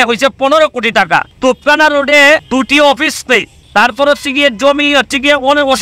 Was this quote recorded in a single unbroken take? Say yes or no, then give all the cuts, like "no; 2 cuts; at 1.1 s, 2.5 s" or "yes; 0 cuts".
no; 3 cuts; at 1.3 s, 2.4 s, 3.6 s